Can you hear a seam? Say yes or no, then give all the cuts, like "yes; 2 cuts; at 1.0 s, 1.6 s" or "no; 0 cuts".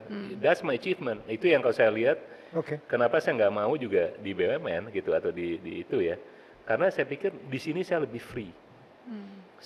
no; 0 cuts